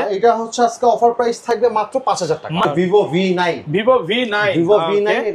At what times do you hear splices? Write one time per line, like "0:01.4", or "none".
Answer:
0:02.6